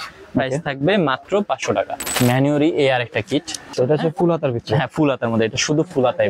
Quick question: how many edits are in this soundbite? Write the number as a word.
two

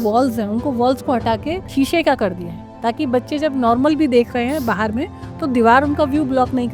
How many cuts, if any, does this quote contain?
one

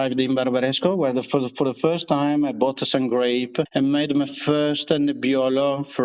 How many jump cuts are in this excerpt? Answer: zero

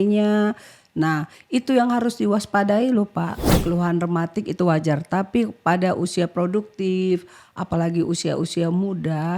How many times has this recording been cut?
one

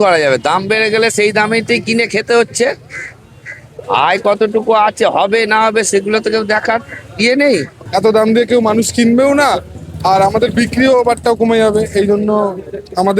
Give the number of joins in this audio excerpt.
one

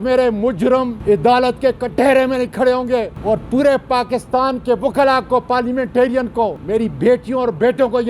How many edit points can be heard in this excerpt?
three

